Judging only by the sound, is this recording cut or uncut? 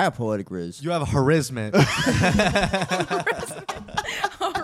uncut